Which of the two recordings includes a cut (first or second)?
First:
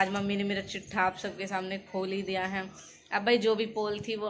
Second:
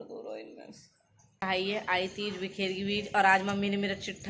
second